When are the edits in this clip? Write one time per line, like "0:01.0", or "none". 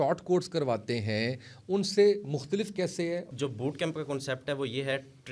0:03.3